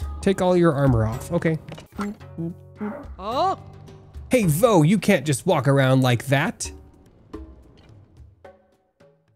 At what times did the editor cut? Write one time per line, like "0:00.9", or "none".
0:01.8
0:07.0